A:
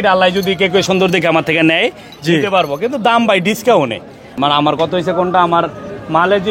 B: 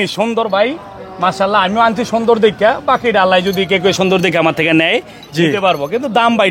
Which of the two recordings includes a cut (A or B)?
A